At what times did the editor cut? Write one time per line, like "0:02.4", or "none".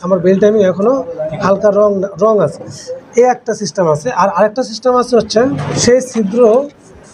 0:05.7